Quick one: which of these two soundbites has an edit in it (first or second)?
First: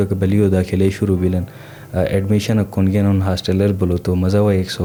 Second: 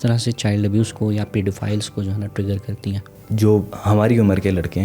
second